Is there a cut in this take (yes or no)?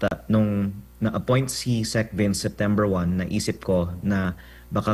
no